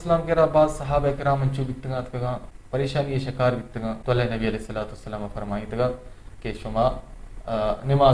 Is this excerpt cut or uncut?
cut